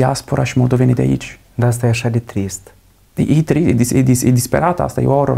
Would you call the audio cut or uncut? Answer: uncut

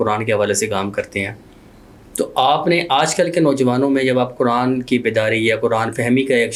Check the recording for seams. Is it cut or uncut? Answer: uncut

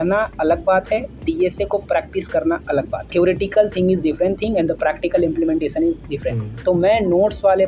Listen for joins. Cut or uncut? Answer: uncut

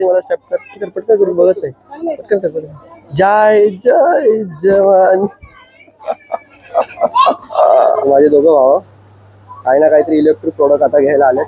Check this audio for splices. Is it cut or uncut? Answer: cut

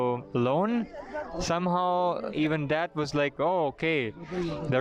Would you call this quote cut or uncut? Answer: cut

